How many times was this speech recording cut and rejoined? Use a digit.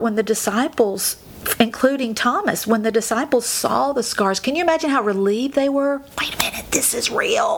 0